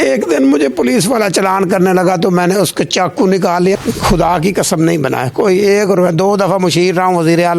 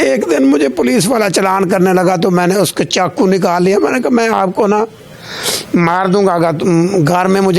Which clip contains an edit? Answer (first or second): first